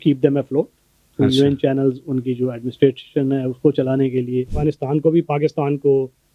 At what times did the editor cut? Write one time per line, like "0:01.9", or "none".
0:04.5

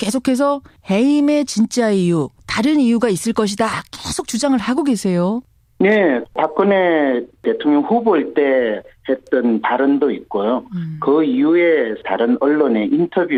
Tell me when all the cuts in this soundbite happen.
none

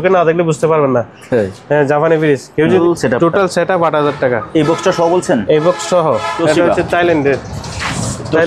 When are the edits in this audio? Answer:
0:02.8
0:06.3

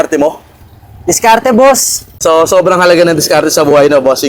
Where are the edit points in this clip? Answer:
none

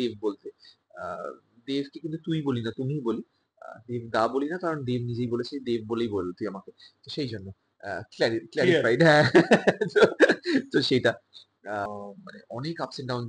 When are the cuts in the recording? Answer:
0:11.8

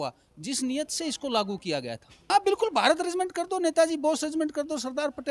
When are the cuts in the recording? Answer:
0:02.3

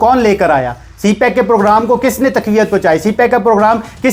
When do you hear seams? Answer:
none

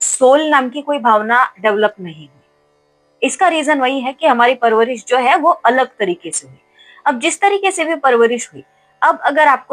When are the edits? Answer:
none

